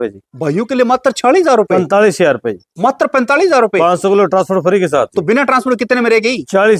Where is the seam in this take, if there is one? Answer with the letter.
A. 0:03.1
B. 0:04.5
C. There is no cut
C